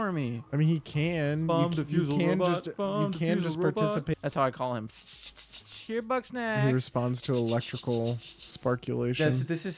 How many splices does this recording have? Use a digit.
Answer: 1